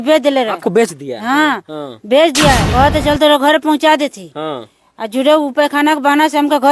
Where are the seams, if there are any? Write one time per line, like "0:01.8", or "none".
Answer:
0:02.7

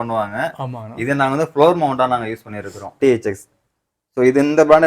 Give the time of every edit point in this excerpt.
0:02.9

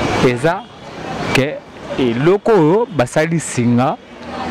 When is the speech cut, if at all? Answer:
none

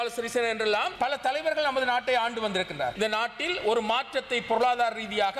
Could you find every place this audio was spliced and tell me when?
0:00.9
0:02.9

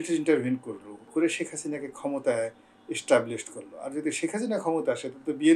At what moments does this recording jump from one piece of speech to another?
0:00.9

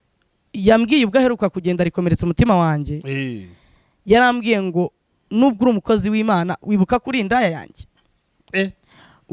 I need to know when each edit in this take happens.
none

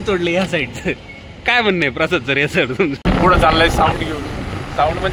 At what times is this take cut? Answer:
0:03.0

